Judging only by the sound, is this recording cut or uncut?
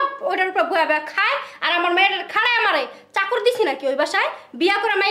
uncut